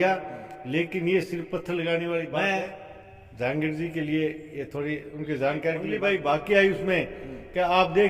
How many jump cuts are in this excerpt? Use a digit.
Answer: 2